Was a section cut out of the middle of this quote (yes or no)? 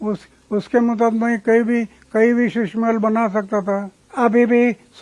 yes